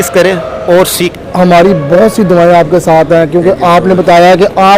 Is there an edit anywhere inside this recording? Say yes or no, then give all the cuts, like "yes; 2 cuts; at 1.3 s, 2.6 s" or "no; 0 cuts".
yes; 1 cut; at 1.1 s